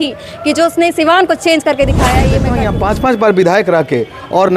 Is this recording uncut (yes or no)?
no